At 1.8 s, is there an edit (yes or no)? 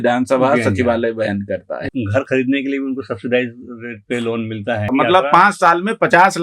yes